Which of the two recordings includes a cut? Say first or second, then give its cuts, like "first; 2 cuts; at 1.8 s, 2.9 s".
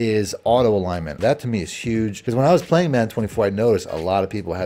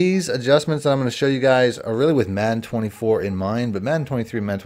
first; 2 cuts; at 1.1 s, 2.2 s